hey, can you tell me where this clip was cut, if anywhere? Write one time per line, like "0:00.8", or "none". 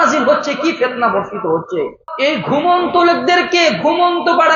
0:02.0